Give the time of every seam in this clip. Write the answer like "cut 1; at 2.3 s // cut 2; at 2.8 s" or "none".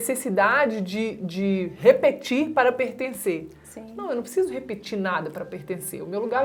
none